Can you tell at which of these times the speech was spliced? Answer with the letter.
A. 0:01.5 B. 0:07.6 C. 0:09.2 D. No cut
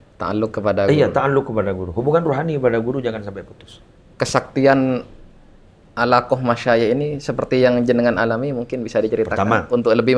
D